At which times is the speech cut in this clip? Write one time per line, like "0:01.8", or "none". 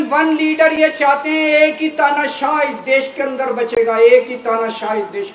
none